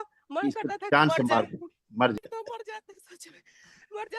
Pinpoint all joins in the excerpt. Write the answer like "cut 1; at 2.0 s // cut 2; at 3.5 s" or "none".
cut 1; at 2.2 s

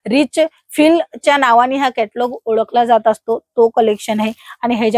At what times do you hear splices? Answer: none

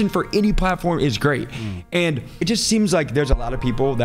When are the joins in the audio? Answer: cut 1; at 2.3 s

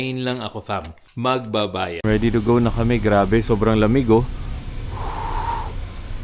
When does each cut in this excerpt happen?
cut 1; at 1.0 s // cut 2; at 2.0 s

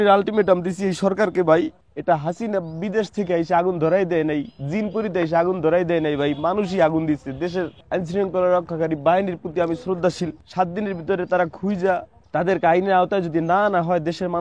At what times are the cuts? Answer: cut 1; at 1.9 s // cut 2; at 7.8 s // cut 3; at 10.4 s // cut 4; at 12.2 s

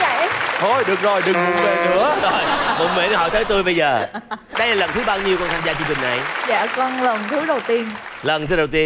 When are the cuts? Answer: cut 1; at 4.4 s

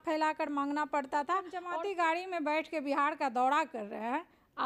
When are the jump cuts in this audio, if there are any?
cut 1; at 1.6 s

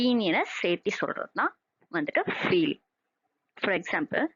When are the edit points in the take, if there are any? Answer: none

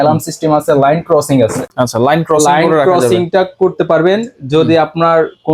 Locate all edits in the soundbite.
none

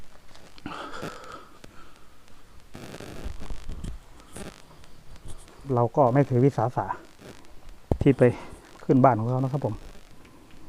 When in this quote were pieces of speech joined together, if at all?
cut 1; at 5.7 s

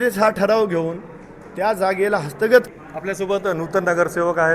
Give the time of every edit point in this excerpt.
cut 1; at 2.7 s

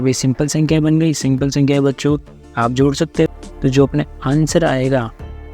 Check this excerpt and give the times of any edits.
cut 1; at 3.3 s

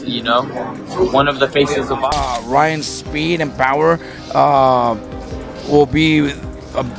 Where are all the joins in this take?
cut 1; at 2.2 s

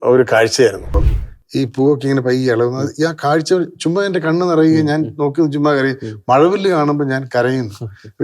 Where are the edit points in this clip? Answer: cut 1; at 0.9 s

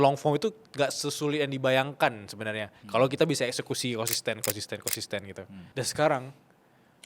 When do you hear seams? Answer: cut 1; at 5.5 s

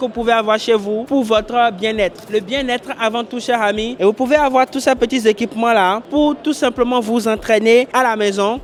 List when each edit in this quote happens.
none

